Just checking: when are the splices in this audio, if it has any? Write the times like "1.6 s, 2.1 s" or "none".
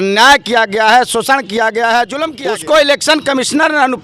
2.3 s